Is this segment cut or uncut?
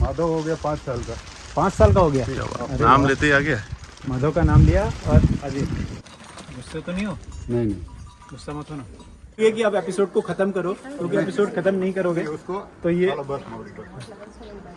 cut